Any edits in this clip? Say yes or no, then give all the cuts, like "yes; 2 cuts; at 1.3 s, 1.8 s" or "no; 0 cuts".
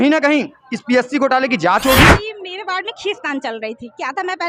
yes; 1 cut; at 2.3 s